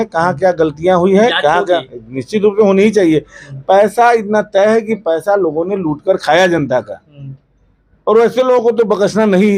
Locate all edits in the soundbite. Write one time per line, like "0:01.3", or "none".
none